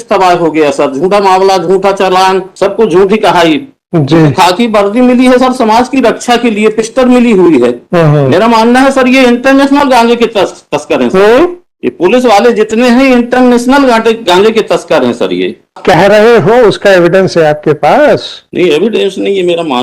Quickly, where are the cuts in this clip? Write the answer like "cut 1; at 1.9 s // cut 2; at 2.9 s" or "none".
cut 1; at 2.5 s // cut 2; at 15.8 s

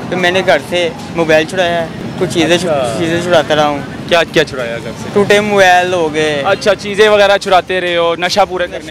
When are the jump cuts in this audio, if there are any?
cut 1; at 2.0 s // cut 2; at 4.9 s

